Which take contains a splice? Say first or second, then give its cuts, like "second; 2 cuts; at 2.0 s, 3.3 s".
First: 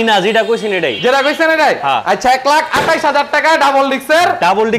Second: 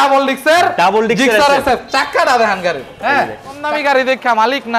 second; 1 cut; at 3.6 s